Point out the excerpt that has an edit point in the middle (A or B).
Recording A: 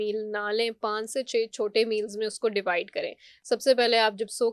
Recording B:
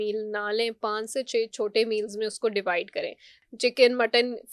B